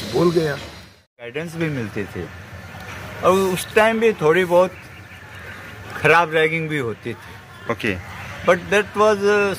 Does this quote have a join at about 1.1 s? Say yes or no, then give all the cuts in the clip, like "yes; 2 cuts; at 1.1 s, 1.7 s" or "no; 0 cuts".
yes; 1 cut; at 1.1 s